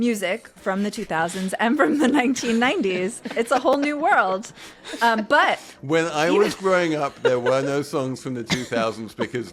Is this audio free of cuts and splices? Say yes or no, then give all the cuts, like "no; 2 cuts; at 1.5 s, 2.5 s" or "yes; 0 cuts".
yes; 0 cuts